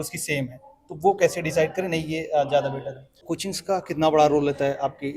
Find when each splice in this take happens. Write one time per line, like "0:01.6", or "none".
0:03.2